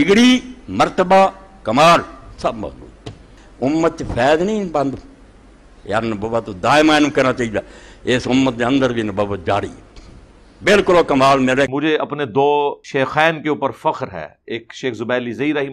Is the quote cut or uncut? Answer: cut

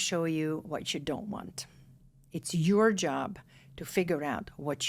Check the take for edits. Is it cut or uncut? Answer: uncut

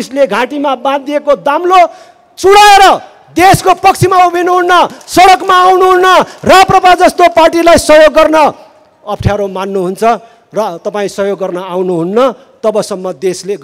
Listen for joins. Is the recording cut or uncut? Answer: uncut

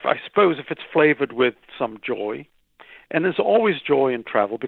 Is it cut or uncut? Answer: uncut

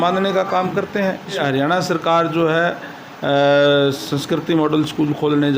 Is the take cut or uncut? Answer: cut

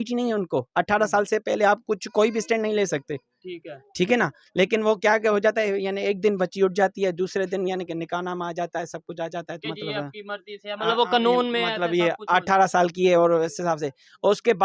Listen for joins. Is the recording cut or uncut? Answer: uncut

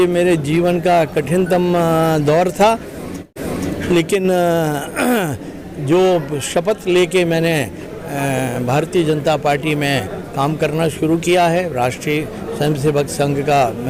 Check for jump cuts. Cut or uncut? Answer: uncut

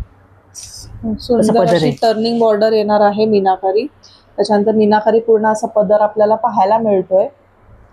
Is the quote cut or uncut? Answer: uncut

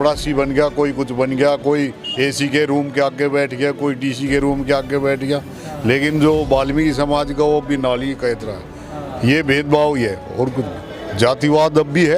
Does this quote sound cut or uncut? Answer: uncut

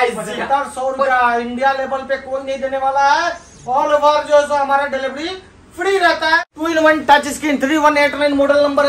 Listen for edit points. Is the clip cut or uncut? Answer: cut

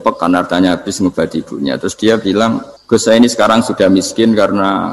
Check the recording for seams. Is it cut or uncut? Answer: cut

